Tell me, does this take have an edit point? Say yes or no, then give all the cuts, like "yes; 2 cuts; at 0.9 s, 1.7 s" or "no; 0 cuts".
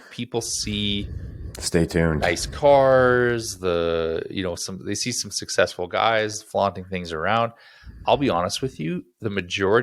no; 0 cuts